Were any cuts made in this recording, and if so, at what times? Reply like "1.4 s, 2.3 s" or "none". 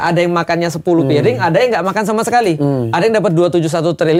none